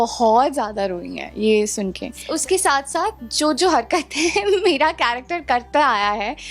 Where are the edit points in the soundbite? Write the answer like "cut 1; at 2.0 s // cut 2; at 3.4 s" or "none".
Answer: cut 1; at 2.3 s